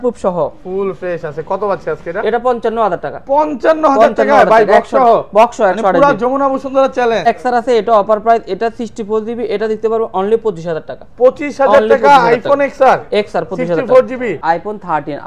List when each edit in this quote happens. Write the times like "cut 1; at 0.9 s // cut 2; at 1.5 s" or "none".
cut 1; at 7.3 s // cut 2; at 14.4 s